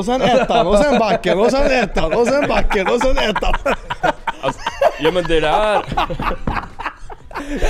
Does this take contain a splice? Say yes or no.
no